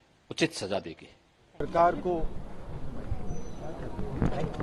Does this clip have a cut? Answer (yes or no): no